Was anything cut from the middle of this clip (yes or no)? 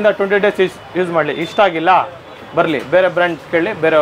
no